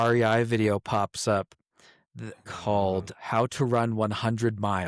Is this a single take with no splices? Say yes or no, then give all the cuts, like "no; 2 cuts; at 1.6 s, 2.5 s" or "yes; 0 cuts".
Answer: yes; 0 cuts